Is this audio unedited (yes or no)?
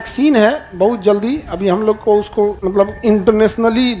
no